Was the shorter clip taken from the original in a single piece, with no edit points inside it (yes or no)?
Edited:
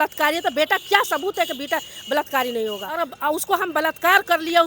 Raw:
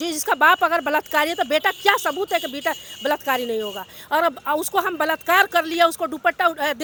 no